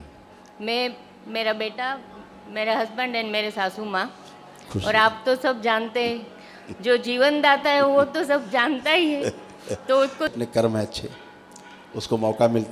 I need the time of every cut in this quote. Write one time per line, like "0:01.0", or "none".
0:10.3